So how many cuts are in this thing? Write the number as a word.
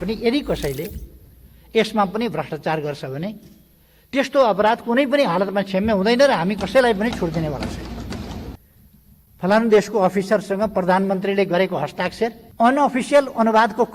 two